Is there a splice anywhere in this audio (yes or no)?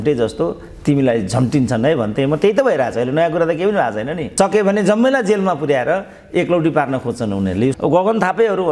yes